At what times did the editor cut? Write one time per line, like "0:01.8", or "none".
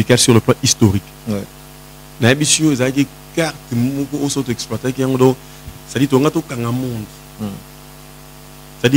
none